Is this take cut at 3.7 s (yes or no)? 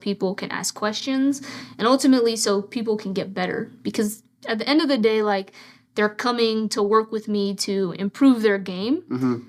no